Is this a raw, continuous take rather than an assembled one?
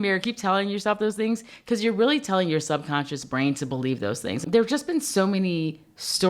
no; 1 cut; at 4.4 s

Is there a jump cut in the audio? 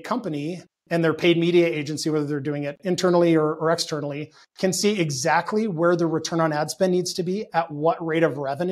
no; 0 cuts

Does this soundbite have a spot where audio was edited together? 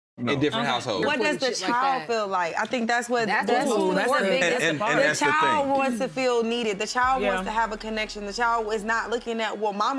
yes; 1 cut; at 1.0 s

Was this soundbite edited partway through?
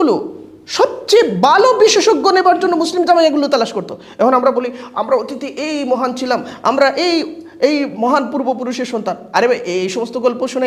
no; 0 cuts

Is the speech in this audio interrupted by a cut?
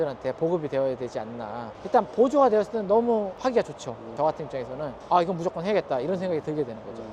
yes; 2 cuts; at 1.8 s, 4.1 s

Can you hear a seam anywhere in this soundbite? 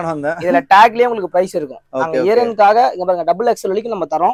no; 0 cuts

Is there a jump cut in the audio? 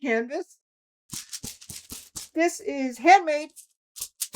yes; 1 cut; at 1.2 s

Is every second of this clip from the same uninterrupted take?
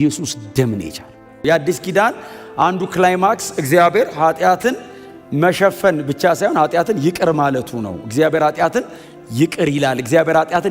no; 1 cut; at 1.4 s

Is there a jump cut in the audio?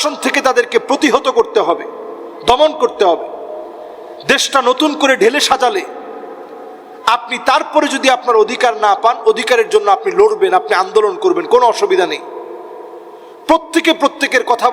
no; 0 cuts

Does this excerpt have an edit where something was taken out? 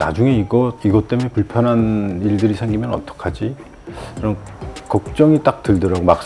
no; 0 cuts

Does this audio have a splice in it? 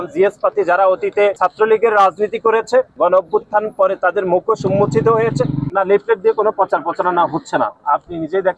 yes; 3 cuts; at 1.4 s, 2.9 s, 5.6 s

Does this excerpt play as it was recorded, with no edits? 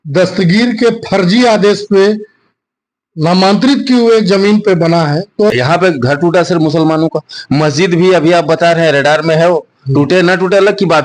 no; 1 cut; at 5.5 s

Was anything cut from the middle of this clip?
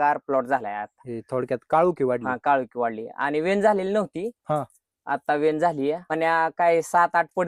yes; 1 cut; at 6.1 s

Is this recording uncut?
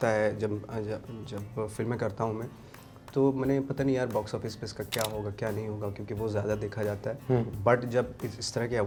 yes; 0 cuts

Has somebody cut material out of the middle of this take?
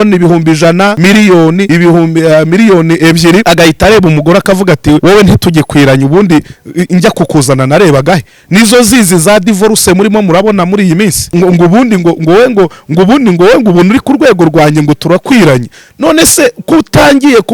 yes; 5 cuts; at 1.0 s, 1.7 s, 3.4 s, 5.0 s, 11.2 s

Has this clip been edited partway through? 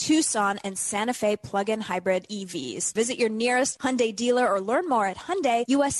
yes; 1 cut; at 2.9 s

